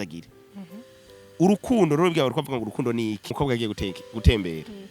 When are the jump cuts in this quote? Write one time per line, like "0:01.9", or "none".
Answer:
0:03.3